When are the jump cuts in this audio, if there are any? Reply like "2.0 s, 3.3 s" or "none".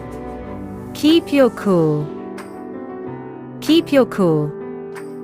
2.0 s, 3.6 s, 4.5 s